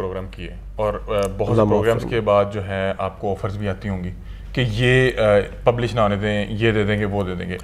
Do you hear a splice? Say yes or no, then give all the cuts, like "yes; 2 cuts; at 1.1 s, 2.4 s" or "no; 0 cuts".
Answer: no; 0 cuts